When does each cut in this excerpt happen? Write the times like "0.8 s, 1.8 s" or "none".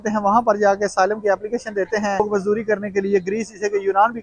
2.3 s